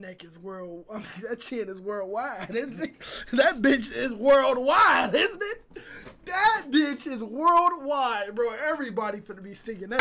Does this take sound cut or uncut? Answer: uncut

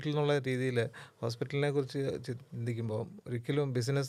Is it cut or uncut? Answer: uncut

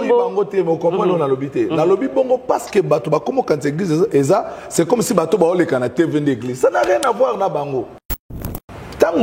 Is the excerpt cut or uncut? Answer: cut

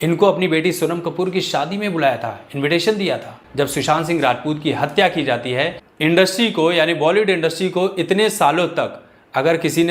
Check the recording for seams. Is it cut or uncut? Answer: cut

